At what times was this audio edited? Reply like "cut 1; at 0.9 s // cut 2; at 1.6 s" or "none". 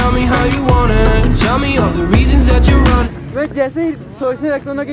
cut 1; at 3.0 s